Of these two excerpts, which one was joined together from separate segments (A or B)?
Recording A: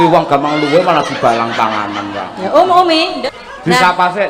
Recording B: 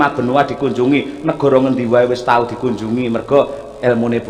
A